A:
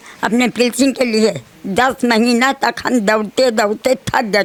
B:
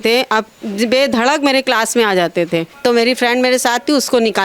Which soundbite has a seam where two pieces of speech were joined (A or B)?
B